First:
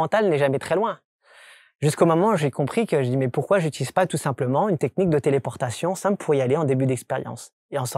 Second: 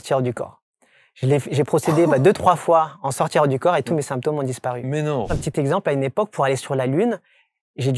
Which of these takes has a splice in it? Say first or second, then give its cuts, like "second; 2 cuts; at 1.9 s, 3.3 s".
second; 1 cut; at 5.4 s